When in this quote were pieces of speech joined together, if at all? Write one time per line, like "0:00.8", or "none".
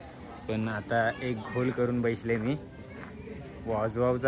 none